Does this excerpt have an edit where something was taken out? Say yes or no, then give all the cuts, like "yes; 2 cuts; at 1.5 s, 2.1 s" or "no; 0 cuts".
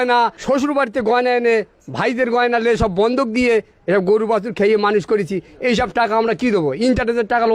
no; 0 cuts